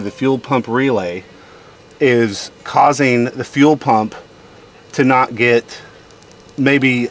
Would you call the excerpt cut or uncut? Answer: uncut